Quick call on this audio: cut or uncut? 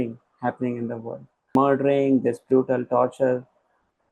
cut